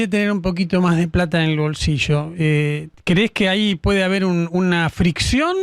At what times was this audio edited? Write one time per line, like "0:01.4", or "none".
none

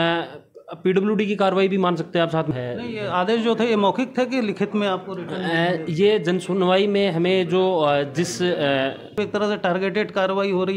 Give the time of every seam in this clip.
0:02.5
0:09.2

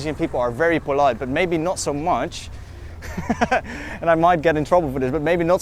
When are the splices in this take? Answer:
none

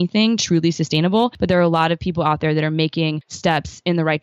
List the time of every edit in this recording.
0:01.4
0:03.3

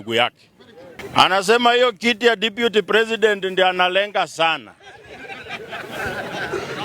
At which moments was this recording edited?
0:01.0

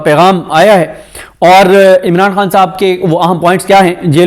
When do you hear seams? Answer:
none

